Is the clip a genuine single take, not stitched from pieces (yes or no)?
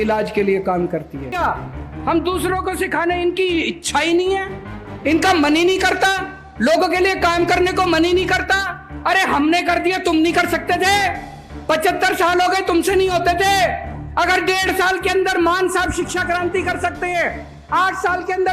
no